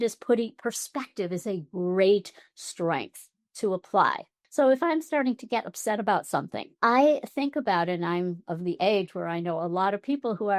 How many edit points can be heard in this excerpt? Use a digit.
1